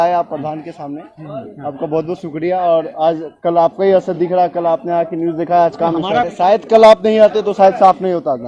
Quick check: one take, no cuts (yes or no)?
no